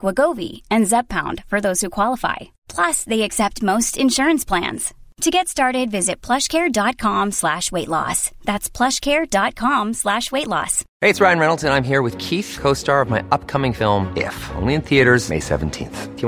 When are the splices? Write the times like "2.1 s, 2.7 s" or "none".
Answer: 10.8 s